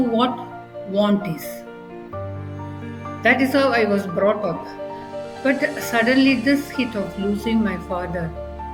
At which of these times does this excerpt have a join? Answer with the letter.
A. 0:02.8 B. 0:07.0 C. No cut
C